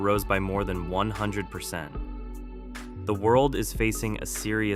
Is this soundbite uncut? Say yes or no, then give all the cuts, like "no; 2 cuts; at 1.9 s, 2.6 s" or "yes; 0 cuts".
no; 2 cuts; at 1.9 s, 3.1 s